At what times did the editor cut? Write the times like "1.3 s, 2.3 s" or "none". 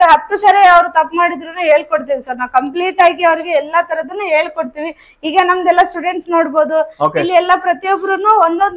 none